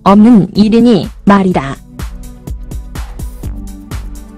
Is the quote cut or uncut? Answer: cut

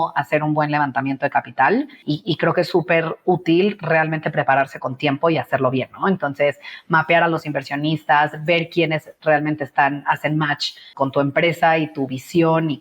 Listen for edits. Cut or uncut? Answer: cut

